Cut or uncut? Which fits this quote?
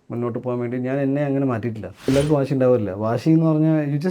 cut